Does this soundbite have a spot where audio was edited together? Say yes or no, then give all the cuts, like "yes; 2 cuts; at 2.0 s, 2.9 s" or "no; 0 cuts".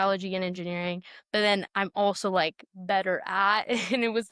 no; 0 cuts